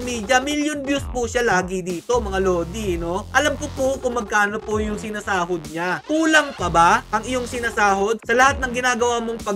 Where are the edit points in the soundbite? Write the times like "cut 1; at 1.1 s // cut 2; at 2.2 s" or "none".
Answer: cut 1; at 6.0 s